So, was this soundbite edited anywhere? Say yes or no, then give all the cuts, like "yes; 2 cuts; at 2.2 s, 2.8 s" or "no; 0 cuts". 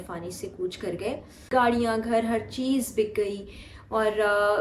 yes; 1 cut; at 1.5 s